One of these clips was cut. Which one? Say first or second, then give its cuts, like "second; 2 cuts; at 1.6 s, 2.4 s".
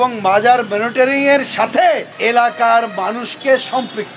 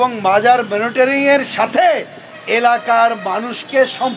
first; 1 cut; at 2.1 s